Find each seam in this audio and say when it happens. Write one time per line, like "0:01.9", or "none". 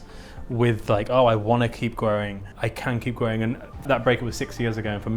0:02.4
0:03.8